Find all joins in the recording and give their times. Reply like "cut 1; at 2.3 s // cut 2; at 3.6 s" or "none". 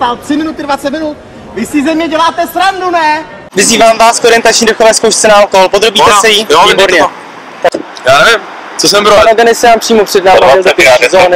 cut 1; at 3.4 s // cut 2; at 7.8 s